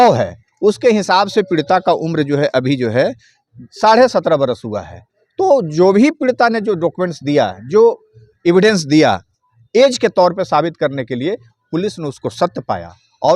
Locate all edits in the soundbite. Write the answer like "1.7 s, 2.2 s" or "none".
none